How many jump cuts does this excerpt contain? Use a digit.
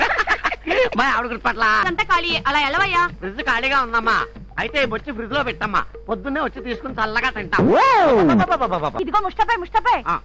2